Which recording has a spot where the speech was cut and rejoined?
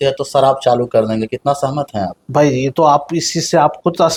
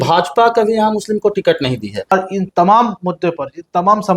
second; 1 cut; at 2.1 s

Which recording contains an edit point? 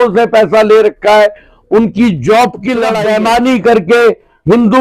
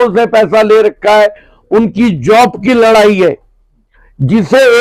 first; 1 cut; at 2.9 s

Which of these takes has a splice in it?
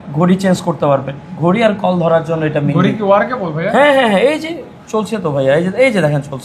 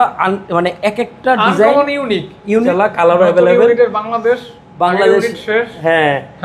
second; 1 cut; at 2.7 s

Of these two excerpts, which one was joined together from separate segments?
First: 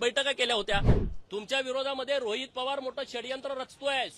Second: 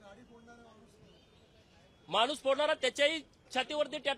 first; 1 cut; at 1.0 s

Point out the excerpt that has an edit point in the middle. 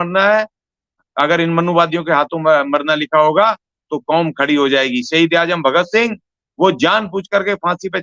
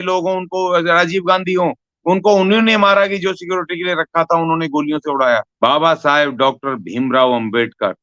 second; 1 cut; at 5.5 s

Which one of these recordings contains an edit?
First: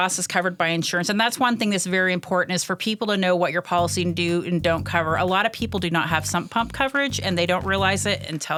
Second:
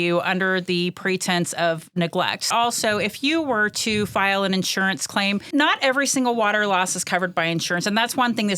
second; 2 cuts; at 2.5 s, 5.5 s

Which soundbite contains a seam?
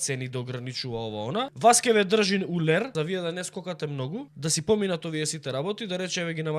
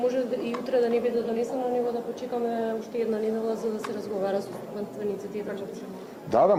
first; 3 cuts; at 1.5 s, 2.9 s, 4.3 s

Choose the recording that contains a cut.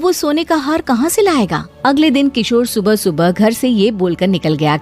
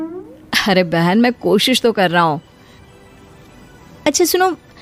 first; 1 cut; at 1.6 s

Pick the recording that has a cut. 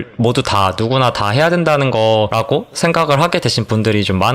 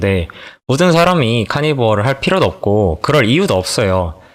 first; 1 cut; at 2.3 s

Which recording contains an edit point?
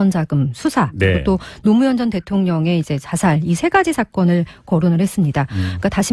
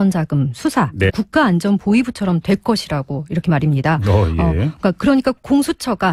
first; 1 cut; at 1.1 s

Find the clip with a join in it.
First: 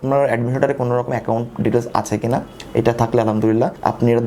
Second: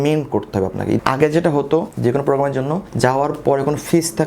second; 3 cuts; at 1.0 s, 1.9 s, 2.9 s

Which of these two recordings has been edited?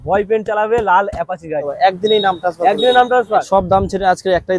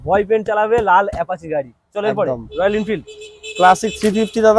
first; 2 cuts; at 1.7 s, 3.5 s

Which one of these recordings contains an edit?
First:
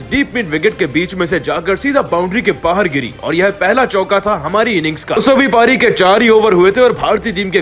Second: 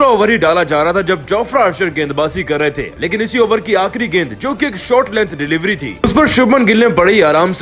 first; 1 cut; at 5.2 s

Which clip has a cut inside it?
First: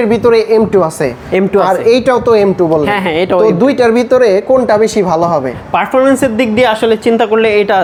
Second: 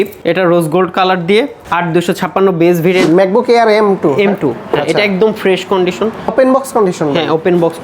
second; 1 cut; at 3.1 s

